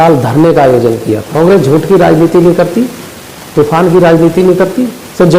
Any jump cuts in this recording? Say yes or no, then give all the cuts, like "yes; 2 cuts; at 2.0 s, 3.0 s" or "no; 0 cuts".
yes; 1 cut; at 1.2 s